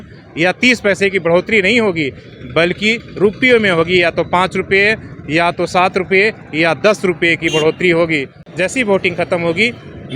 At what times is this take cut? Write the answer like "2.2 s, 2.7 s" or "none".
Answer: 8.4 s